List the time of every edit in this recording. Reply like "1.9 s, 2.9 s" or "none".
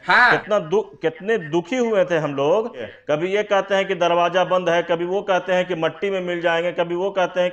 2.9 s